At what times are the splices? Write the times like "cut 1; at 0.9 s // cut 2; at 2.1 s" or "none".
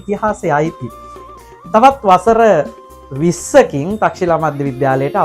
cut 1; at 1.2 s